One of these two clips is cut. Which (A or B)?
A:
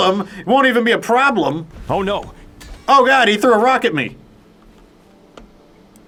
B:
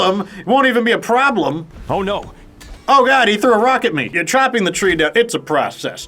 B